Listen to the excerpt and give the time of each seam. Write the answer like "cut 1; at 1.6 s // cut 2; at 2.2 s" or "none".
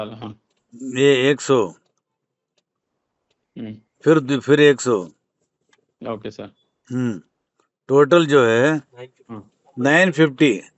none